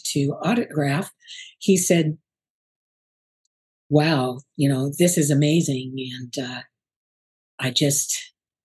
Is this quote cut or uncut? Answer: uncut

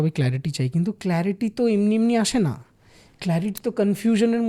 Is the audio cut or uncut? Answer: uncut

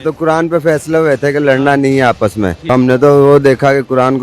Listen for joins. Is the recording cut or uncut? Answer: cut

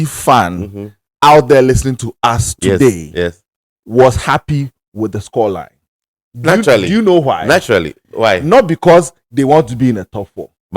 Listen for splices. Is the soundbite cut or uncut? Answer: uncut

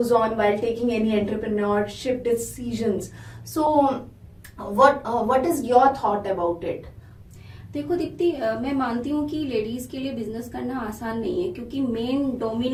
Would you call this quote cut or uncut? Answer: uncut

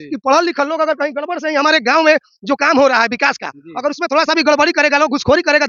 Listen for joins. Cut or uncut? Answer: uncut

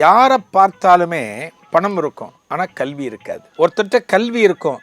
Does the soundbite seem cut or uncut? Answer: cut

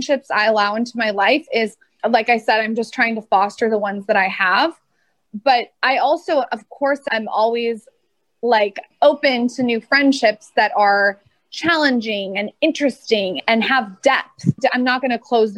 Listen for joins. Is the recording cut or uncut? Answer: uncut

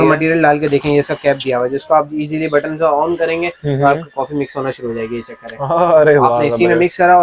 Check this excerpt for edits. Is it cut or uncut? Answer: uncut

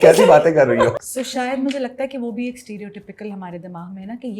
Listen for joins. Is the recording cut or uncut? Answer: cut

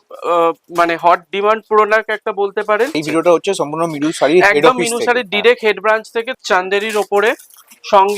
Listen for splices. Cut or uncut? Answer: cut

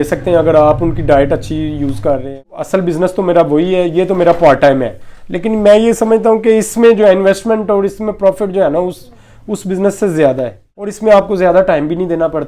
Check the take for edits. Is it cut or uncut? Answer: cut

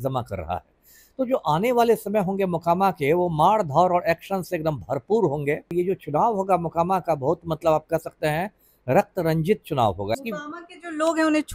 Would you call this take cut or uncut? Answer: cut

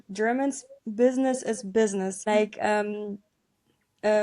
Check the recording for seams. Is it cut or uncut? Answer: cut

